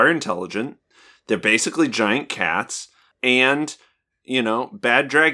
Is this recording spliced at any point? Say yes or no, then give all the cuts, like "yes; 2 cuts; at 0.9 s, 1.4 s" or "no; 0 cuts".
yes; 1 cut; at 3.1 s